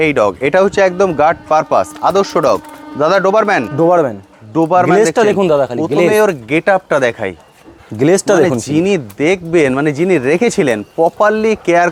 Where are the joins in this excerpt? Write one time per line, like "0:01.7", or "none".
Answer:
none